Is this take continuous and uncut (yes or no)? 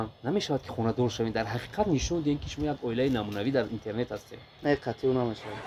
yes